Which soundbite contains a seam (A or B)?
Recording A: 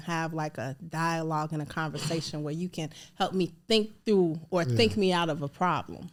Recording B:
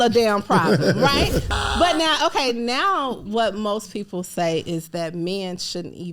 B